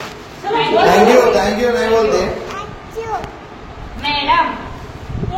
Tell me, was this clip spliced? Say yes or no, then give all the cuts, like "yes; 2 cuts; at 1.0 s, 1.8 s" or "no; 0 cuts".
no; 0 cuts